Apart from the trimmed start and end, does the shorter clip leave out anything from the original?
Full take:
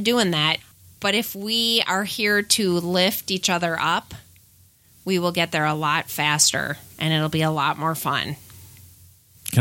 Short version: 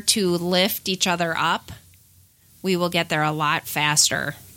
no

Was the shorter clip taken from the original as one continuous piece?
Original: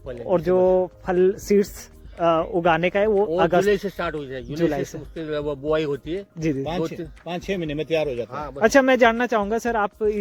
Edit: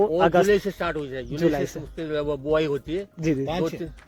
yes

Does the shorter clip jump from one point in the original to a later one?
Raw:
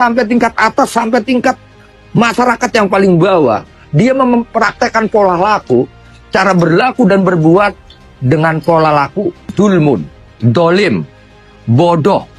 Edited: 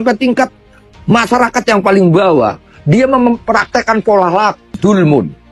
yes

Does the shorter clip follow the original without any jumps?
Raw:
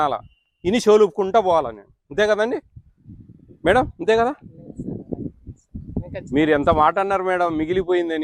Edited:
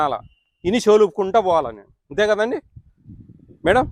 yes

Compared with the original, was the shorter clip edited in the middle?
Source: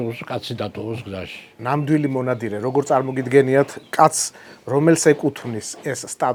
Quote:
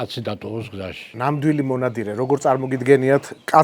yes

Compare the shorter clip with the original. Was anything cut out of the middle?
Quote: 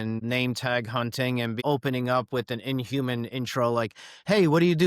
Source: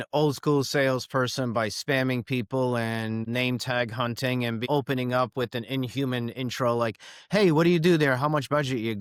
no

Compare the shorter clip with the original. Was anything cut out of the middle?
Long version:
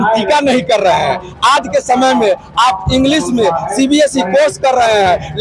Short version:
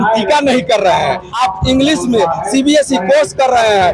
yes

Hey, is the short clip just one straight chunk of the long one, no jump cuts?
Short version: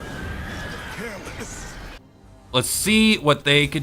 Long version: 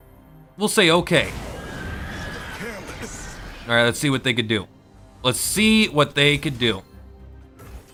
no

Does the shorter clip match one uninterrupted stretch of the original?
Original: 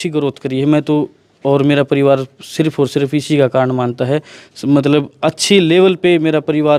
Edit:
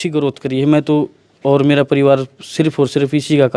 yes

